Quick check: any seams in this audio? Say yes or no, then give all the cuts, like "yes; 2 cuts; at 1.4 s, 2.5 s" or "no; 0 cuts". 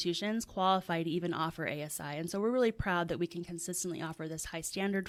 no; 0 cuts